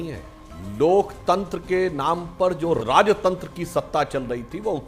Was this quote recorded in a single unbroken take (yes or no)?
no